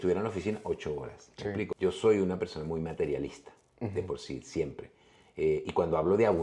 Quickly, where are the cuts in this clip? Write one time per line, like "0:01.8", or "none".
0:01.7